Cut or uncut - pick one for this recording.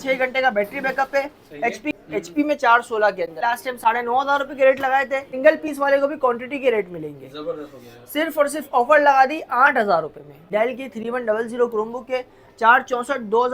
cut